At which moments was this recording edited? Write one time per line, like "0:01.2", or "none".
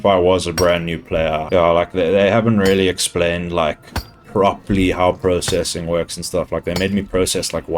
0:01.4
0:04.1

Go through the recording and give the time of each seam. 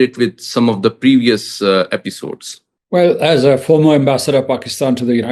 none

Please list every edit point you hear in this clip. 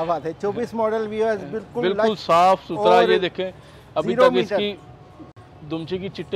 none

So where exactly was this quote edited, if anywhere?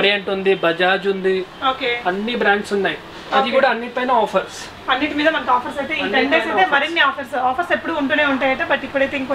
none

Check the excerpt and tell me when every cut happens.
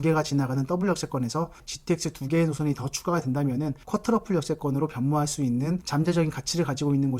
0:01.6

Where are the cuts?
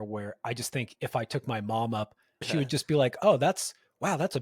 0:02.5

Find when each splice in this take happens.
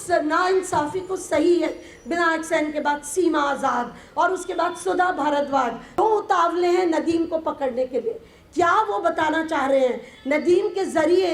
0:06.0

